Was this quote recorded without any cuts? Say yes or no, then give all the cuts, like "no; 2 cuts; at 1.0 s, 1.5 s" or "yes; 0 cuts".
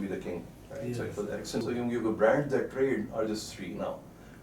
no; 1 cut; at 1.6 s